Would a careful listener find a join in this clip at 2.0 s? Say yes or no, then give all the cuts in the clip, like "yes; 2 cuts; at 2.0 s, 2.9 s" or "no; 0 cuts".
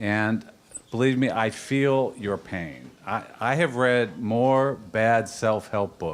no; 1 cut; at 4.4 s